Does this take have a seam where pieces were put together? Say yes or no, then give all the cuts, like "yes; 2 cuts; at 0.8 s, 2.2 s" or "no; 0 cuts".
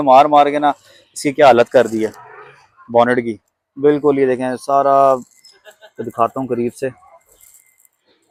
no; 0 cuts